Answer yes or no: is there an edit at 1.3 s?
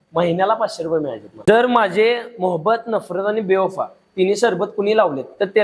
yes